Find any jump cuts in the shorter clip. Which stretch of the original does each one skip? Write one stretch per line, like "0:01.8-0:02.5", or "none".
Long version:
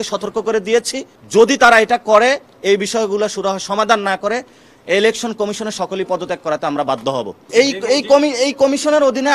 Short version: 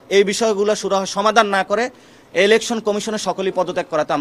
none